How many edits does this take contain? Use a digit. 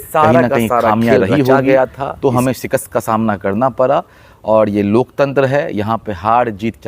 1